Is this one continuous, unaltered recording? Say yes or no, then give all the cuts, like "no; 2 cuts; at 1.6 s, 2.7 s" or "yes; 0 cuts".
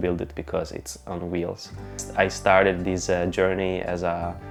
yes; 0 cuts